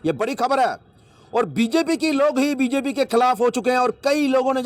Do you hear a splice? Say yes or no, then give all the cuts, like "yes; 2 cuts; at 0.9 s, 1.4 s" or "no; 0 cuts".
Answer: no; 0 cuts